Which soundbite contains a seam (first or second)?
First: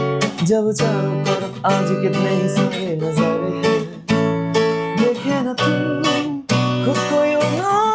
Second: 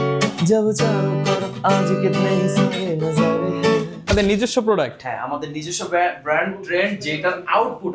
second